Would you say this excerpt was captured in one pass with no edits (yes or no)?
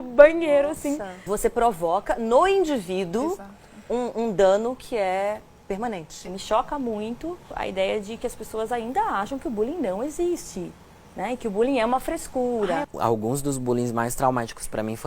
no